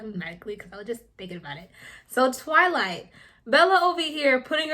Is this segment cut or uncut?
uncut